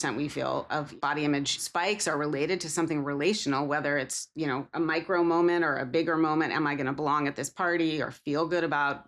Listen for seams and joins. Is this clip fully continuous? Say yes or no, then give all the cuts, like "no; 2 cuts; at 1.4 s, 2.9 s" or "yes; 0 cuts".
no; 2 cuts; at 0.9 s, 1.6 s